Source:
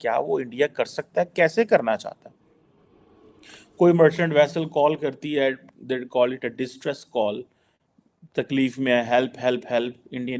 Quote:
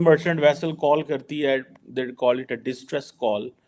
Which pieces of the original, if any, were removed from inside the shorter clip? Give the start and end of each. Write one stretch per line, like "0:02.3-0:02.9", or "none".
none